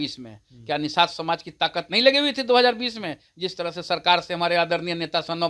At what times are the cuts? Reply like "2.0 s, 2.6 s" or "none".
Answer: none